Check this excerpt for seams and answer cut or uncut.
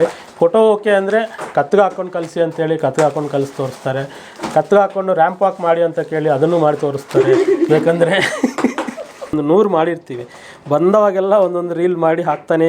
cut